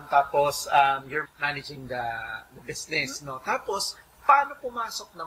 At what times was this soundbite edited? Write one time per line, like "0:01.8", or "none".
0:01.2